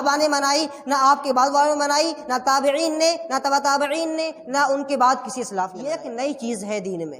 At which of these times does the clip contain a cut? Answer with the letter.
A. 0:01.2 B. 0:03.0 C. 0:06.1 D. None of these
C